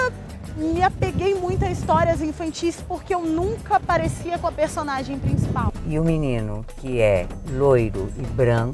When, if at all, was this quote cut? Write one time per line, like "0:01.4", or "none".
0:05.7